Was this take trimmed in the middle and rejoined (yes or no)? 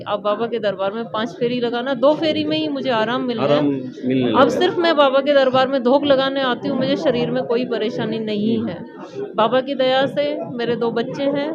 no